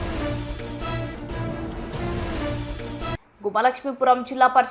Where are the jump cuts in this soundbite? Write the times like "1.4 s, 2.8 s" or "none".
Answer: none